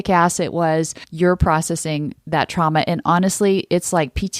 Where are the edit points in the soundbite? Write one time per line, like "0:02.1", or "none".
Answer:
0:01.0